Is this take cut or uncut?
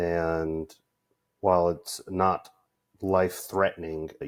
uncut